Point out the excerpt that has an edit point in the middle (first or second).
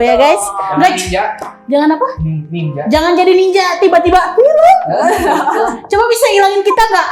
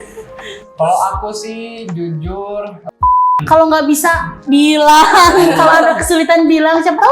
second